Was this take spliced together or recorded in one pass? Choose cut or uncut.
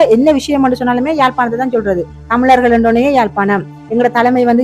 uncut